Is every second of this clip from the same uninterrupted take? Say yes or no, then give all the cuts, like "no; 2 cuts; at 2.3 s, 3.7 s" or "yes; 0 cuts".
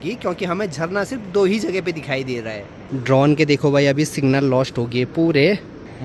no; 1 cut; at 2.7 s